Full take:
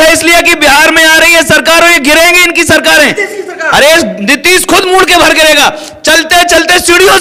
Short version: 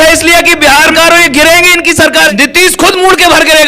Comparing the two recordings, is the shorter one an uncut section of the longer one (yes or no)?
no